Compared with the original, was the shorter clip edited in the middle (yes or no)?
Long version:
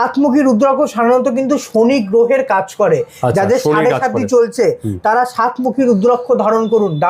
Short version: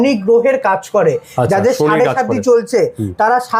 no